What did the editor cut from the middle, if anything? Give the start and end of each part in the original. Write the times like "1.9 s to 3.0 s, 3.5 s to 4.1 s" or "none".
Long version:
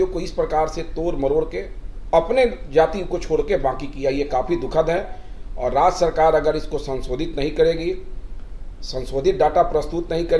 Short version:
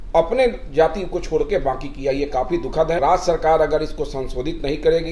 5.0 s to 5.7 s